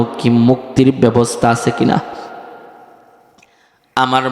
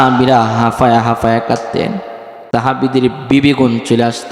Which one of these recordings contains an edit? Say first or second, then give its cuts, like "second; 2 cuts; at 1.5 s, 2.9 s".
second; 1 cut; at 2.5 s